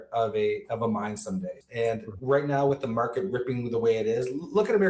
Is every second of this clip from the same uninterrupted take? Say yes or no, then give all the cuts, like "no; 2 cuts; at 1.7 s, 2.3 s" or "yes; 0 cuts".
no; 1 cut; at 1.6 s